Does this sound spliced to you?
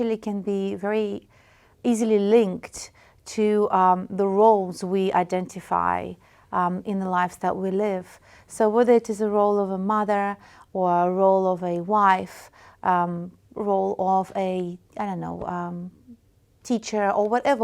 no; 0 cuts

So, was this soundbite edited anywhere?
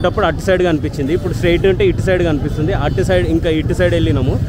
no; 0 cuts

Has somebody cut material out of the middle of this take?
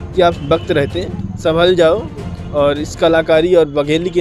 no; 0 cuts

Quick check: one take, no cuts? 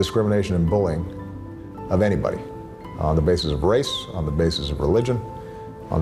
yes; 0 cuts

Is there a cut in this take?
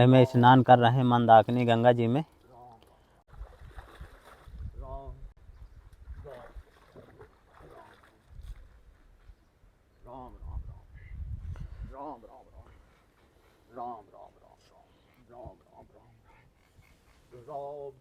no; 0 cuts

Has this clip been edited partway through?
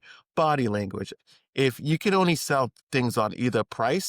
yes; 1 cut; at 1.1 s

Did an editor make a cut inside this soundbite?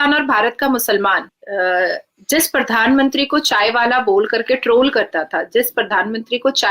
yes; 1 cut; at 1.3 s

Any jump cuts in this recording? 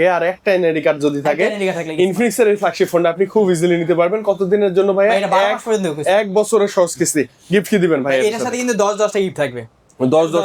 no; 0 cuts

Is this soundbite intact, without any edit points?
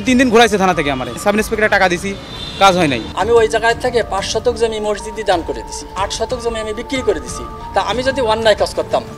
no; 4 cuts; at 1.1 s, 3.1 s, 5.9 s, 7.5 s

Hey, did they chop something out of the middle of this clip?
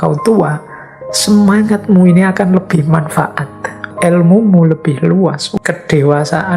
yes; 2 cuts; at 3.9 s, 5.4 s

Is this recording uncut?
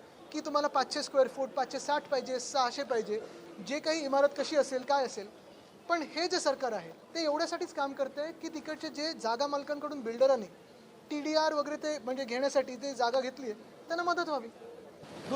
no; 1 cut; at 7.0 s

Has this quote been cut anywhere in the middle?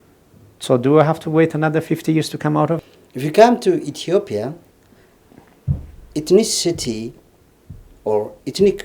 yes; 1 cut; at 2.8 s

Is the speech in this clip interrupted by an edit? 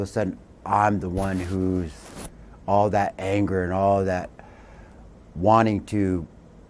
no; 0 cuts

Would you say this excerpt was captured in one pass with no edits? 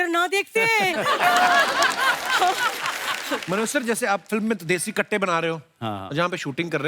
no; 1 cut; at 3.3 s

